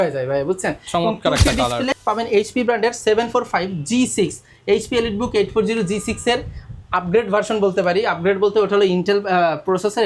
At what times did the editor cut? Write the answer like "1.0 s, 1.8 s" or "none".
1.9 s

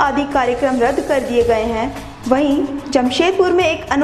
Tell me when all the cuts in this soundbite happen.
none

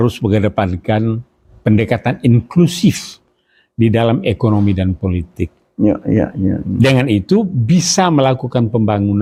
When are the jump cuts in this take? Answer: none

